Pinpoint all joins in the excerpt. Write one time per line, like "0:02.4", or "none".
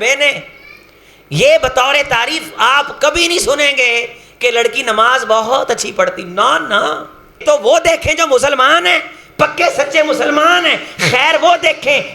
0:07.4